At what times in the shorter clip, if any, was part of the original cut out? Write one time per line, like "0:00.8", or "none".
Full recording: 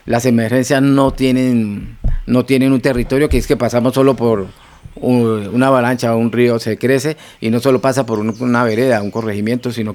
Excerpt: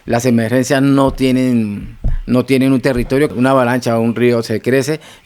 0:03.3